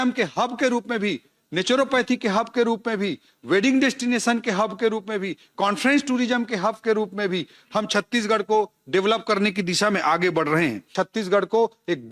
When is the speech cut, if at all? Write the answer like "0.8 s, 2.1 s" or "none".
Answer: 10.8 s